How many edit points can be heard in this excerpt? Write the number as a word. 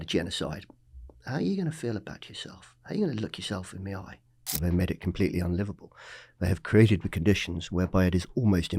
one